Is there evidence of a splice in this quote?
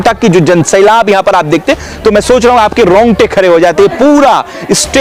no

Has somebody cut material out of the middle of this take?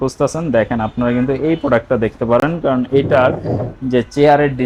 no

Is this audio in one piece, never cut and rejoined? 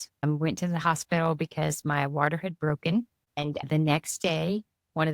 no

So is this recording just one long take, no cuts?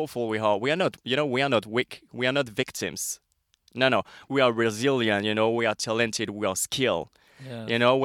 no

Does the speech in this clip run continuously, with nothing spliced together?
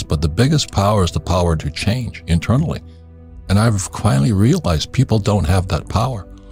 yes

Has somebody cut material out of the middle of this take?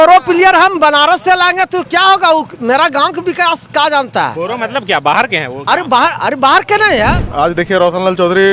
yes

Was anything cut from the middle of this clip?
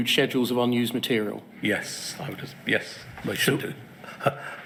no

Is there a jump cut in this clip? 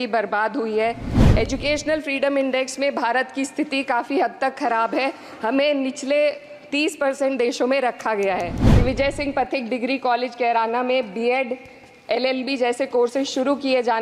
yes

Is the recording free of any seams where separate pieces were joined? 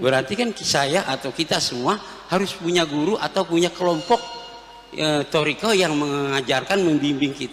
yes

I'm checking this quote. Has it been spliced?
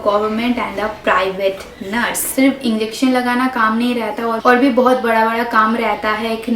yes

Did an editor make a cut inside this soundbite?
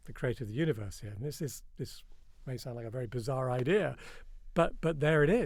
no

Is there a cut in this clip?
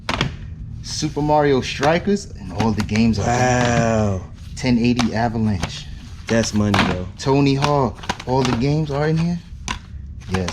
no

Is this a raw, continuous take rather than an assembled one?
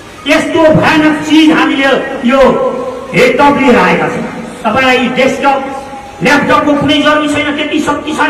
yes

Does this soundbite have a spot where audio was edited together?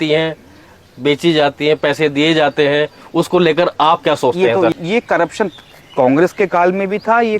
yes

